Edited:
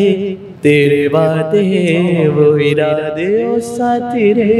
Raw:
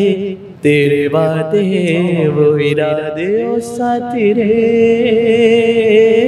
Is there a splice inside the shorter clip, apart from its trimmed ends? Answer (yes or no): no